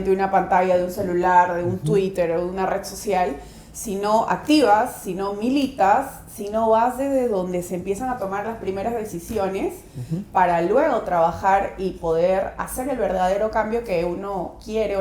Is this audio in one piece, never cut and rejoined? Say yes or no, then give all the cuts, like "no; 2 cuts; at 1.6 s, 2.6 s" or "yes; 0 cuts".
yes; 0 cuts